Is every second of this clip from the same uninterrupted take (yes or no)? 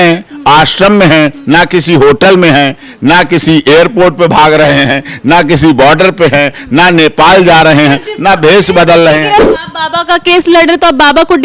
no